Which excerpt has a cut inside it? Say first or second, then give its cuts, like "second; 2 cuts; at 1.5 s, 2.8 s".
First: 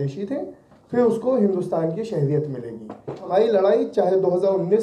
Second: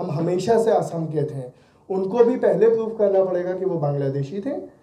first; 1 cut; at 3.2 s